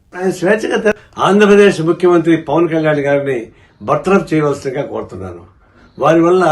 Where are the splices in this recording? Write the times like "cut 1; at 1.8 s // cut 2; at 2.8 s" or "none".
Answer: cut 1; at 0.9 s